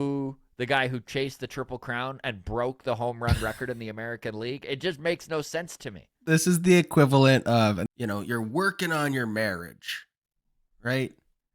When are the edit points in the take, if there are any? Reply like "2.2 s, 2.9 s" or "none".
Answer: 6.2 s, 7.8 s